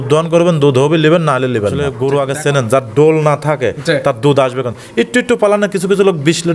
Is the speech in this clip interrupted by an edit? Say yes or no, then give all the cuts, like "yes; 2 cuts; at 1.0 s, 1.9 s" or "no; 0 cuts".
yes; 1 cut; at 1.8 s